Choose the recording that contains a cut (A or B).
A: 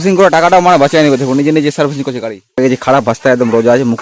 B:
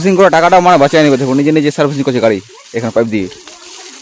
A